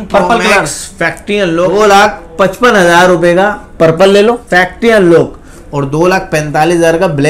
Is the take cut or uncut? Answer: cut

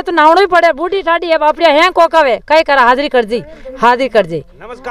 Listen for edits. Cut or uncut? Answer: uncut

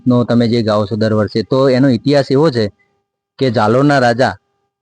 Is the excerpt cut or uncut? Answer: uncut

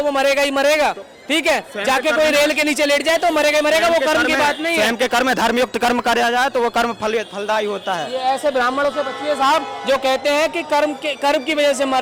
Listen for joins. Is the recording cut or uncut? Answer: uncut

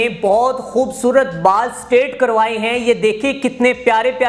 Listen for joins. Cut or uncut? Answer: uncut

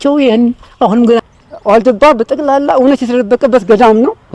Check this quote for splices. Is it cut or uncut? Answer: cut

